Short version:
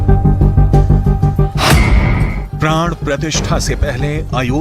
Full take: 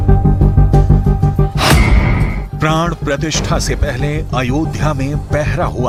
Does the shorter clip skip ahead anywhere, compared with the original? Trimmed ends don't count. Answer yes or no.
no